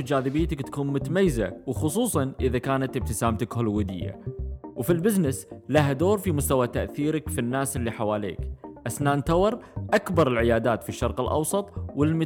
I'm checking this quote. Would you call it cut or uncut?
uncut